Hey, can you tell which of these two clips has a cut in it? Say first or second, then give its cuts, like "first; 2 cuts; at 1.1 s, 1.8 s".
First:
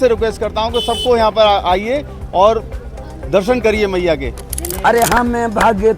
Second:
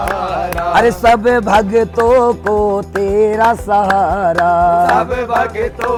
first; 1 cut; at 4.7 s